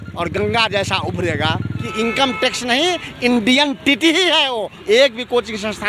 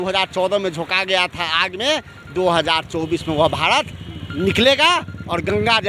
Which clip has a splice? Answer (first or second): first